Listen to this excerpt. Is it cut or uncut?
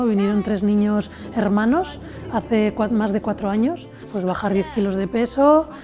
cut